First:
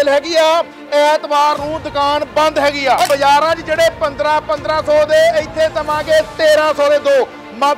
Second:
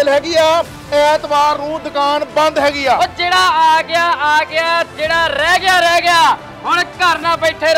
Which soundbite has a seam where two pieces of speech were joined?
first; 1 cut; at 3.1 s

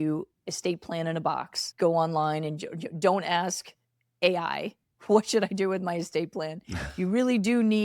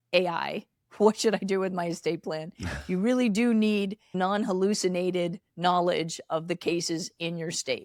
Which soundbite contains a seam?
first; 1 cut; at 1.6 s

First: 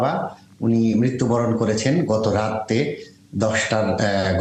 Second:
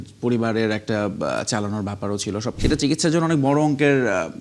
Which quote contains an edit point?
second; 1 cut; at 2.5 s

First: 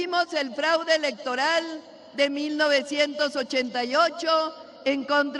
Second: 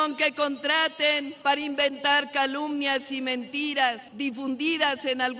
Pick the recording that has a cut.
second; 2 cuts; at 1.3 s, 4.1 s

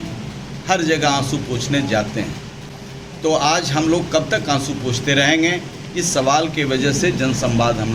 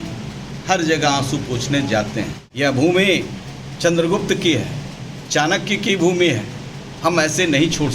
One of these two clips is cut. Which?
second; 1 cut; at 2.4 s

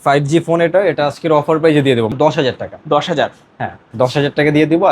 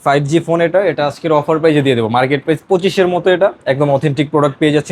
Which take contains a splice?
first; 1 cut; at 2.1 s

